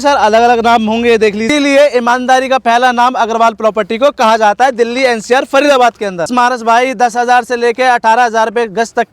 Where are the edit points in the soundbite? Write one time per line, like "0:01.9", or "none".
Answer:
0:01.5
0:06.3